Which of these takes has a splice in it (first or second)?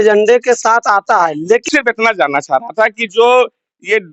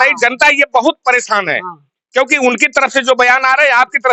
first